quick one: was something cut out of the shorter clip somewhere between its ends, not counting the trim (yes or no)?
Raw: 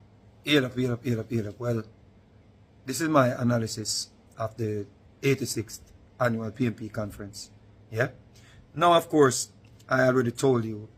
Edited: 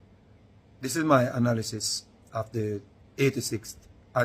no